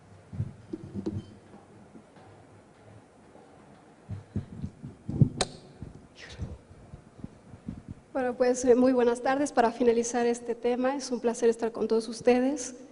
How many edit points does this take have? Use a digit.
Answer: 0